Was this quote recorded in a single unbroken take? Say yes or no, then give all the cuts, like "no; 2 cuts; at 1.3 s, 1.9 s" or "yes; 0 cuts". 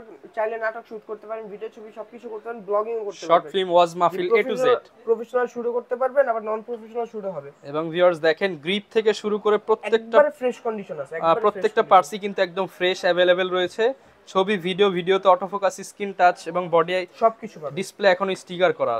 yes; 0 cuts